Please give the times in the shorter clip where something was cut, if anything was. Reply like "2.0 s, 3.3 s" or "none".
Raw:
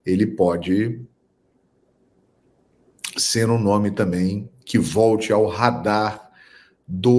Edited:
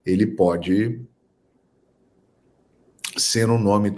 none